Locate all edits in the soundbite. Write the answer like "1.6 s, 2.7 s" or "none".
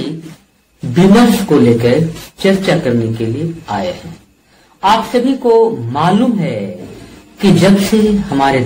none